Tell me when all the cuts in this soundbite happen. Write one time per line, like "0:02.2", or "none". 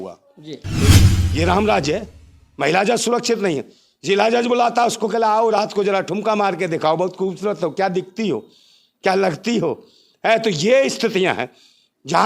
0:00.9